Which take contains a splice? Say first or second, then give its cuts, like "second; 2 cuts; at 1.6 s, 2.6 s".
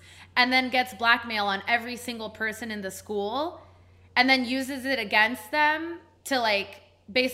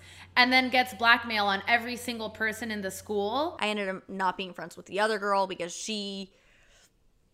second; 1 cut; at 3.5 s